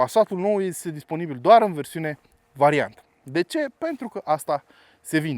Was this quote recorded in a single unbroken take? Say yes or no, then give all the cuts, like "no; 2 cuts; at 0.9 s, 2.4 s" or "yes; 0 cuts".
yes; 0 cuts